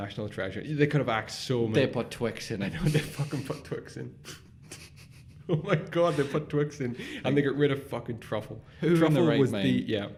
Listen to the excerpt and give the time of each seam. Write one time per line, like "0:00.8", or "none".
none